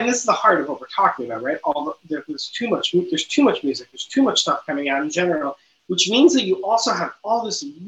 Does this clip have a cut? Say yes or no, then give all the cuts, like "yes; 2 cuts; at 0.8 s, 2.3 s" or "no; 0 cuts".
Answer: no; 0 cuts